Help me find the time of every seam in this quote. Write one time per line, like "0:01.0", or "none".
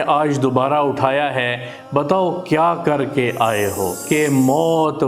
0:04.0